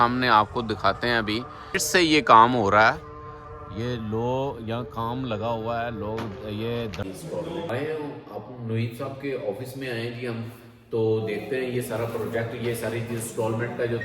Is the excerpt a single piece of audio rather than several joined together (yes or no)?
no